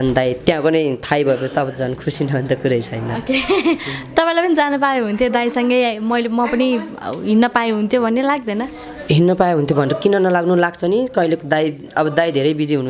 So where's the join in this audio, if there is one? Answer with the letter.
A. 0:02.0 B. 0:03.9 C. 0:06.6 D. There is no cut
D